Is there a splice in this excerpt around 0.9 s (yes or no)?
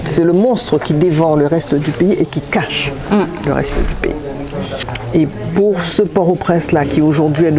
no